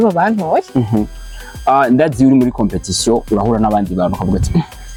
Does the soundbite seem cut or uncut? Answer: uncut